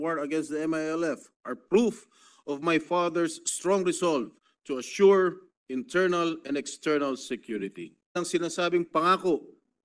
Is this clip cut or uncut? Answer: cut